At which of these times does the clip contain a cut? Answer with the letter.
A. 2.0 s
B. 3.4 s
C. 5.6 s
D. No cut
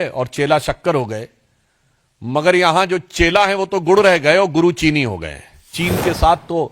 C